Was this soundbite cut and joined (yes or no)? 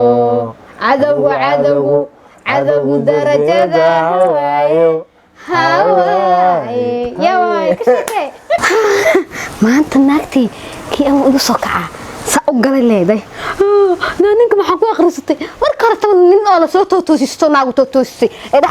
yes